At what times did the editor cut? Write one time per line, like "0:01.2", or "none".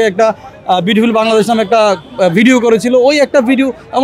none